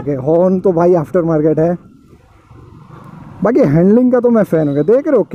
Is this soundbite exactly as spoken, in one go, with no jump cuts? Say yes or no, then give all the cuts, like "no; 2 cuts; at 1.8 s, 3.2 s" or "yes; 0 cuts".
yes; 0 cuts